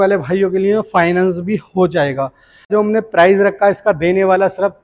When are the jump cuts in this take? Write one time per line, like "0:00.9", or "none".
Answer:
0:02.7